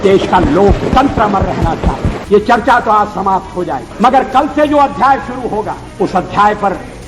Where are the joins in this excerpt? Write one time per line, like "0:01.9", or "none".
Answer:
0:02.2
0:03.9
0:05.8